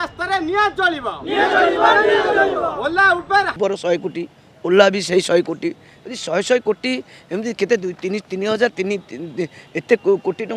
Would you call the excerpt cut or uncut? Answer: cut